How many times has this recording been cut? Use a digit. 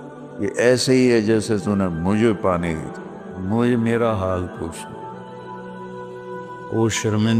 2